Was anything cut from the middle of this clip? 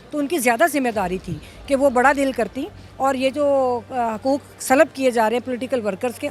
no; 0 cuts

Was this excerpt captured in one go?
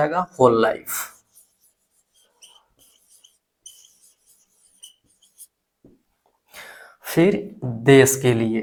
yes; 0 cuts

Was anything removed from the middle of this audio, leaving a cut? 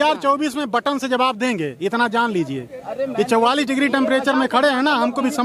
no; 0 cuts

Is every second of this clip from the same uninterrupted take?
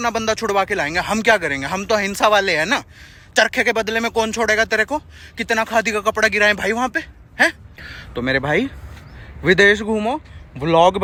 yes; 0 cuts

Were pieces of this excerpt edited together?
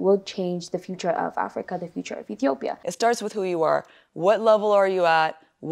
yes; 1 cut; at 2.8 s

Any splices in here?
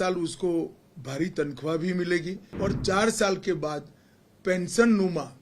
yes; 1 cut; at 2.4 s

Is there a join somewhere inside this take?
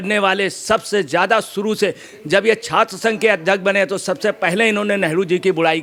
no; 0 cuts

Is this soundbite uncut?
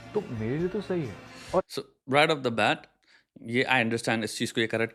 yes; 0 cuts

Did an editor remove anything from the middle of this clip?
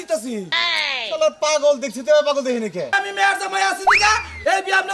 yes; 1 cut; at 2.9 s

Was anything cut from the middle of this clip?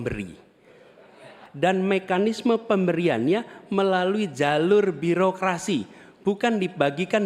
yes; 1 cut; at 1.4 s

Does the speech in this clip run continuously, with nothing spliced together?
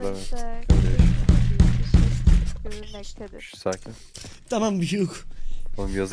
yes; 0 cuts

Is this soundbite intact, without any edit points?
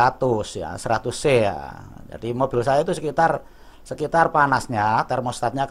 yes; 0 cuts

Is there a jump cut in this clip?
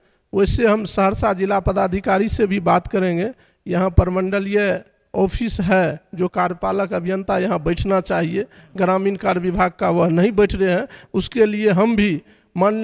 no; 0 cuts

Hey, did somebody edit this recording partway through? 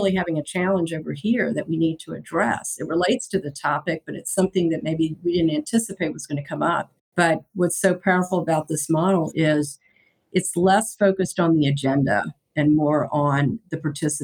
yes; 1 cut; at 7.0 s

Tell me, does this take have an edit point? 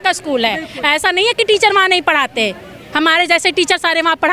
no; 0 cuts

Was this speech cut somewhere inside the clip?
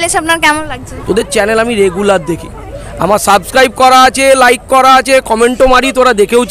no; 0 cuts

